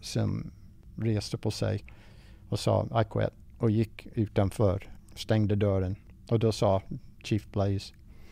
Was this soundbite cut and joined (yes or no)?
no